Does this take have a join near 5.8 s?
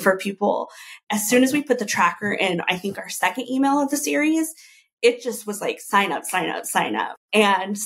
no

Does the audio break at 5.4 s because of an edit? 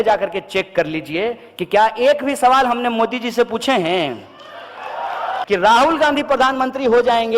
yes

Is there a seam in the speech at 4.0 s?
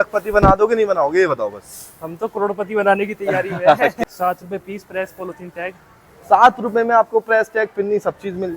yes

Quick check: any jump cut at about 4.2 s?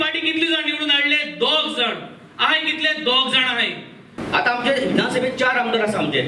yes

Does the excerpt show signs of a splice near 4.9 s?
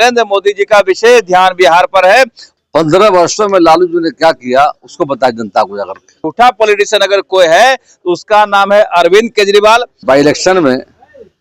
no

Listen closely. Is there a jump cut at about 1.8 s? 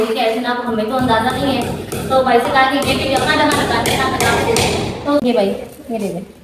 no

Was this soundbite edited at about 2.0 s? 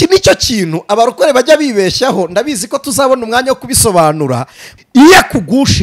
no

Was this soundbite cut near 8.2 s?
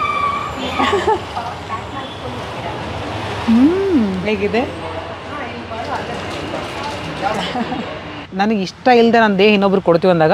yes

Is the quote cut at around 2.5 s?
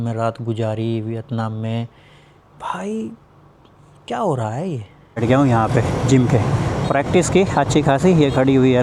no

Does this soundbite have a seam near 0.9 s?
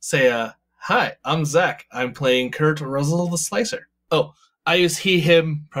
no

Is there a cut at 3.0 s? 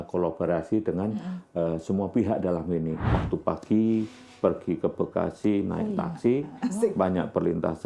yes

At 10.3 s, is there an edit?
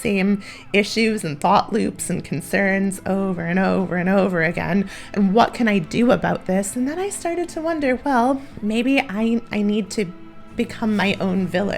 no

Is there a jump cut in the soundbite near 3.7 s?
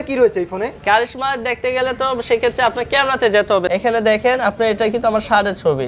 yes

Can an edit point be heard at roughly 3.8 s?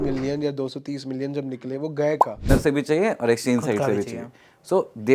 no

